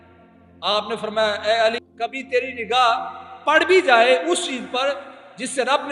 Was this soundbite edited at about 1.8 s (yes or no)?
yes